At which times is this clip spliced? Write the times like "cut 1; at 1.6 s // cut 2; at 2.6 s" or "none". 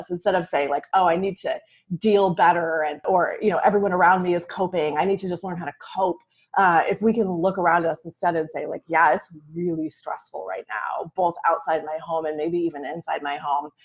cut 1; at 3.1 s